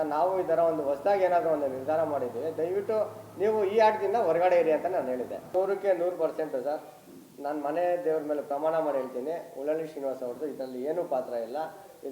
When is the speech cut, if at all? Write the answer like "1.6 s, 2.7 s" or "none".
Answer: 5.5 s